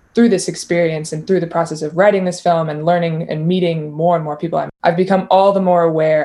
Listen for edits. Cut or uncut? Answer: cut